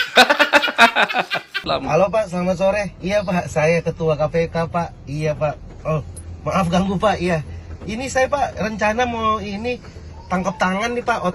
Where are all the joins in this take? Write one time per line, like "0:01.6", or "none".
0:01.8